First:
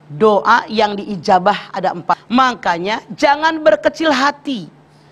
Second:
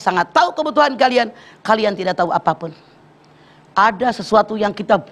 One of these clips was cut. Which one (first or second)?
first